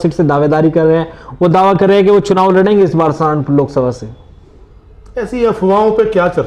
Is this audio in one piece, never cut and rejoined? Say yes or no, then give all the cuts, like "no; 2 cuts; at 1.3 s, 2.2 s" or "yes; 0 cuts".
yes; 0 cuts